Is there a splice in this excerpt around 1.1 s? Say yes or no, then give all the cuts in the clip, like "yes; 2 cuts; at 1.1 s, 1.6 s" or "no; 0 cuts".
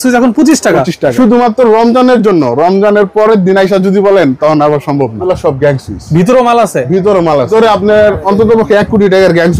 yes; 3 cuts; at 1.1 s, 5.2 s, 7.5 s